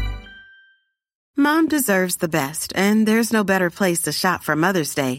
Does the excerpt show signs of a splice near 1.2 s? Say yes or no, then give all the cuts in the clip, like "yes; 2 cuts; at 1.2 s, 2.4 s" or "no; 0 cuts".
yes; 1 cut; at 1.2 s